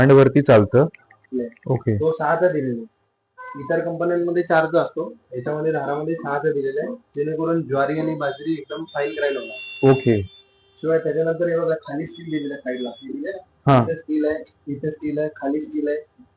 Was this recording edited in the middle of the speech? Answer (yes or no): yes